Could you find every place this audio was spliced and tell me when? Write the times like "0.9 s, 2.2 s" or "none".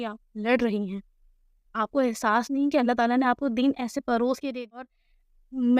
4.5 s